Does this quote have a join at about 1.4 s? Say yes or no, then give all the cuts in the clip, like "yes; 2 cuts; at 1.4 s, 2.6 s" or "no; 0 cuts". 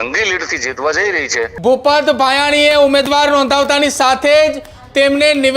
yes; 1 cut; at 1.4 s